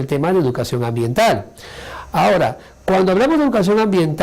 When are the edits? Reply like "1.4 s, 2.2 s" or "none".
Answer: 0.9 s